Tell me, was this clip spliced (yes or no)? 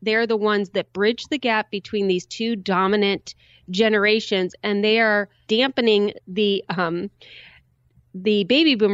yes